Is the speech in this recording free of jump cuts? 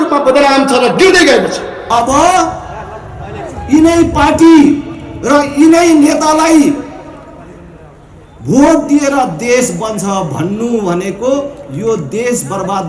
no; 1 cut; at 1.7 s

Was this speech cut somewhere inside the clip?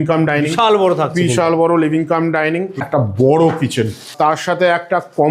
yes; 2 cuts; at 2.8 s, 4.1 s

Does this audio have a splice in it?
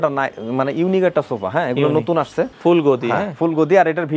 yes; 1 cut; at 2.5 s

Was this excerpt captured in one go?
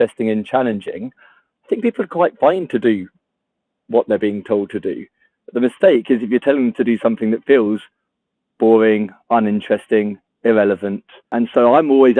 no; 1 cut; at 11.3 s

